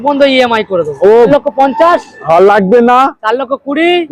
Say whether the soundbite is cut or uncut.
cut